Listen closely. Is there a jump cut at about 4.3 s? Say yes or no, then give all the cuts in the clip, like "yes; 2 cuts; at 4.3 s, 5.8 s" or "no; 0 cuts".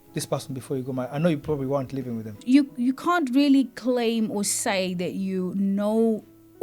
no; 1 cut; at 2.4 s